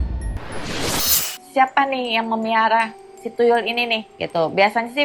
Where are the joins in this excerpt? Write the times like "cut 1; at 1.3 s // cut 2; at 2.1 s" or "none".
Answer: cut 1; at 1.2 s // cut 2; at 4.1 s